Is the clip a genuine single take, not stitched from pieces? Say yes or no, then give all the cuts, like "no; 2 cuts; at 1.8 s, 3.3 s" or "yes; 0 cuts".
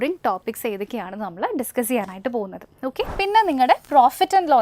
no; 1 cut; at 3.1 s